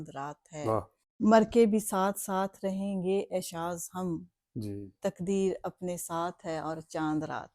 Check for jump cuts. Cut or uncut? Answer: cut